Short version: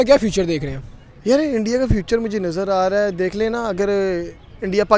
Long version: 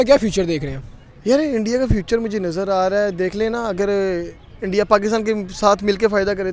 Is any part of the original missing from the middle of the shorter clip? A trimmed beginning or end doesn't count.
no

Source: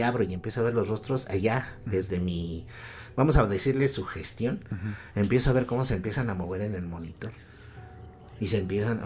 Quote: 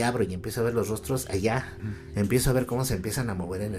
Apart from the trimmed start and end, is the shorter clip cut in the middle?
yes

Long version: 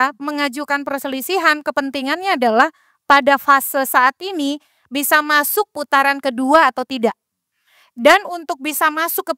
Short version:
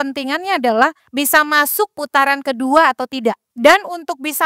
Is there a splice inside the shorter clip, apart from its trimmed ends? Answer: yes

